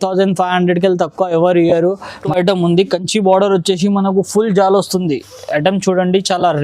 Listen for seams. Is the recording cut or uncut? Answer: cut